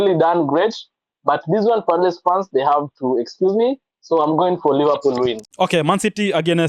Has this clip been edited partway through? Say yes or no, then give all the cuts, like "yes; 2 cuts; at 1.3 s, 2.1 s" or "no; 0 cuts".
no; 0 cuts